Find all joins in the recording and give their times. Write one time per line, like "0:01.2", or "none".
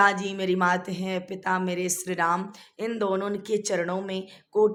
none